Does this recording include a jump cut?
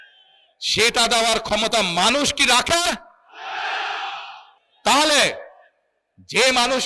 no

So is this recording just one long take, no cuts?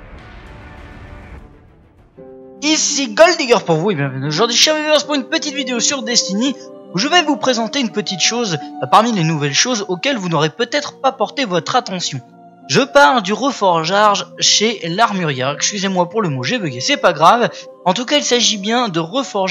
yes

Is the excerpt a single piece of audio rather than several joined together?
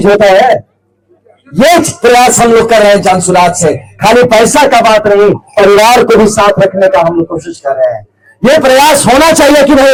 yes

